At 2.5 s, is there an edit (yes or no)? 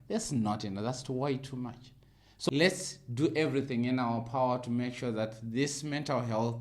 yes